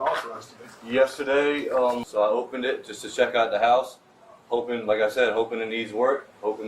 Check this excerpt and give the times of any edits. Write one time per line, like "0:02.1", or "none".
0:02.0